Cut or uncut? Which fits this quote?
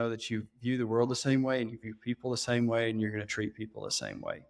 uncut